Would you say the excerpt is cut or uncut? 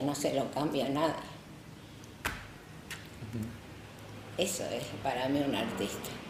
uncut